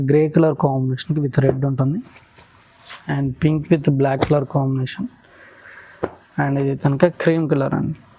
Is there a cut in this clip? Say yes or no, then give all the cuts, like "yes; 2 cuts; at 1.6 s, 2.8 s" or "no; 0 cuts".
no; 0 cuts